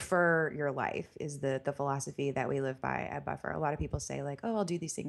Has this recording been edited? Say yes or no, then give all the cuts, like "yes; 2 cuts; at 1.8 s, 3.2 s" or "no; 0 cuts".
no; 0 cuts